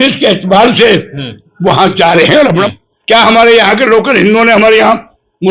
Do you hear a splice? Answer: yes; 1 cut; at 2.7 s

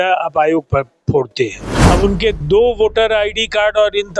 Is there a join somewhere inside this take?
yes; 1 cut; at 1.7 s

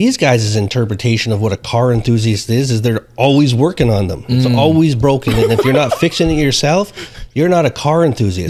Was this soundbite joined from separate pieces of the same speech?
no; 0 cuts

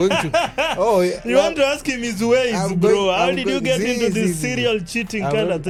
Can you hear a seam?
no; 0 cuts

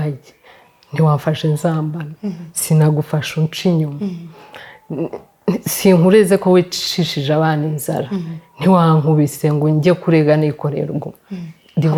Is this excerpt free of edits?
yes; 0 cuts

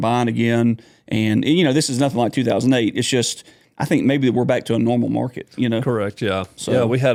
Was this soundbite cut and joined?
no; 0 cuts

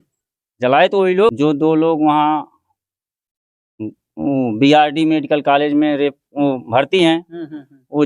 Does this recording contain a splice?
yes; 1 cut; at 1.3 s

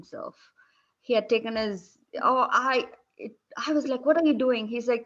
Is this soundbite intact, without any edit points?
yes; 0 cuts

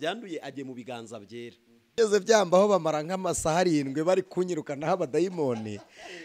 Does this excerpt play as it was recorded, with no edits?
no; 1 cut; at 1.7 s

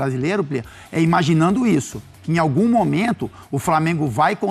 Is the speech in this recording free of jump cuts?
yes; 0 cuts

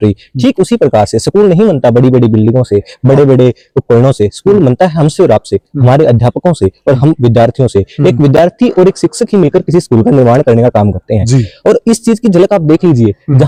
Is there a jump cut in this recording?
no; 0 cuts

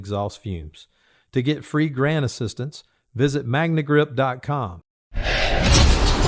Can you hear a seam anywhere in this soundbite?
yes; 1 cut; at 4.8 s

